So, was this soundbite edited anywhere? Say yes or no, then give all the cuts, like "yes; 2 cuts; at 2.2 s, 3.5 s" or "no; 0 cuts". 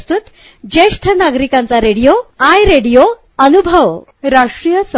yes; 1 cut; at 4.1 s